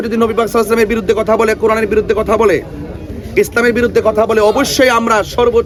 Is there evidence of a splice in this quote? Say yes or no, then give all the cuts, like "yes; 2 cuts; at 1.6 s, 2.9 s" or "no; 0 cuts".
no; 0 cuts